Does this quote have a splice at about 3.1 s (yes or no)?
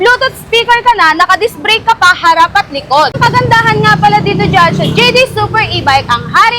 yes